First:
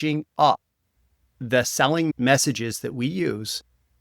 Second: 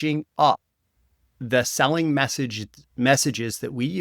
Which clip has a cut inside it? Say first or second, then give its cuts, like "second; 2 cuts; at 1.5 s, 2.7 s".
first; 1 cut; at 2.1 s